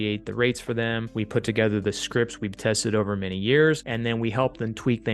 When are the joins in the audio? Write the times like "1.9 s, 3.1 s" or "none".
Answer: 1.1 s, 3.9 s

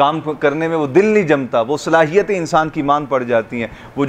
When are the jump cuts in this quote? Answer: none

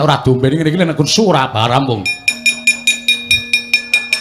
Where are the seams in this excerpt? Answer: none

